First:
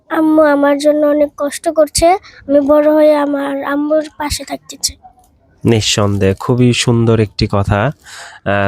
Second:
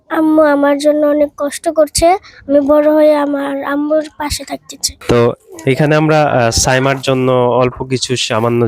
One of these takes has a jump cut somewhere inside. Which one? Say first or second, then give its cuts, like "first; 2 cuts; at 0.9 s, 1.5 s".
second; 1 cut; at 4.9 s